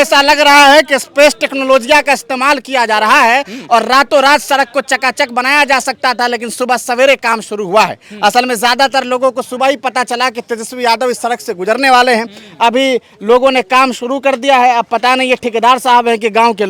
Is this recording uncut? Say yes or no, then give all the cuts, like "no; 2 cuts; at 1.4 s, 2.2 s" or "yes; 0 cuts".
yes; 0 cuts